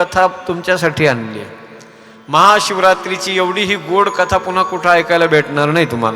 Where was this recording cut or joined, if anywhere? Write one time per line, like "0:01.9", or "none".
none